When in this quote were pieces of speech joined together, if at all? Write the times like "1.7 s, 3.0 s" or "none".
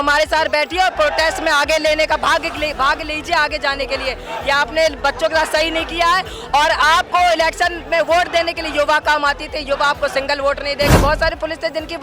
10.9 s